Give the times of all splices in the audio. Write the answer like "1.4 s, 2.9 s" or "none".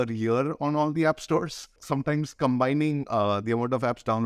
1.8 s